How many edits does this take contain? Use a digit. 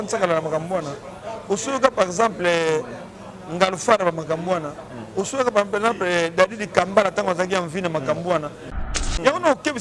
1